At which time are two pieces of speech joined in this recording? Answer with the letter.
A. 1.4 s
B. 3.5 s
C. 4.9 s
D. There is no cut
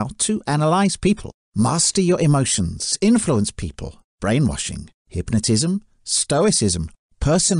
A